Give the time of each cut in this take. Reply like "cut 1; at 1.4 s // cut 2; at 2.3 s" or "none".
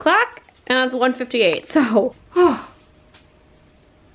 cut 1; at 2.2 s